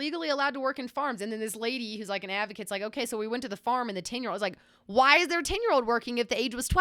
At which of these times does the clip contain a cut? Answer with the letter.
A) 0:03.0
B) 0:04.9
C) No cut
C